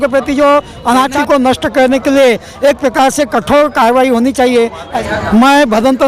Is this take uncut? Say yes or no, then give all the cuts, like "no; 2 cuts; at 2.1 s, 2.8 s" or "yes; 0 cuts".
no; 2 cuts; at 1.2 s, 5.0 s